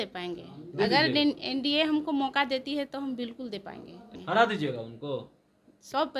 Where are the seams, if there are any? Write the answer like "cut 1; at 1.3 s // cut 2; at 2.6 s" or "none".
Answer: cut 1; at 4.1 s